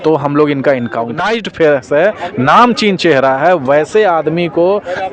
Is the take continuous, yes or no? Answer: no